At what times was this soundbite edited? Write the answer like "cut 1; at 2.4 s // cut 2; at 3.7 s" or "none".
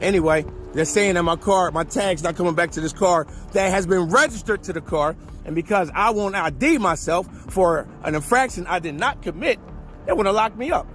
none